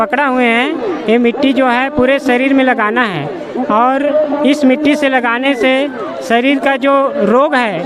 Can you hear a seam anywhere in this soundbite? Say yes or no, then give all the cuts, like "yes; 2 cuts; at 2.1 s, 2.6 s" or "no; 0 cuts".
no; 0 cuts